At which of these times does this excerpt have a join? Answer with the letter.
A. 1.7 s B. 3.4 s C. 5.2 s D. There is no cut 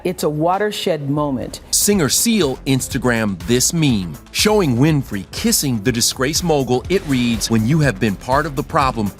A